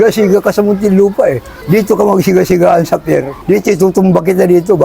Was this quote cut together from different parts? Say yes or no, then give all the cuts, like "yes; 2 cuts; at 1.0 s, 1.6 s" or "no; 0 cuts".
yes; 2 cuts; at 1.5 s, 3.3 s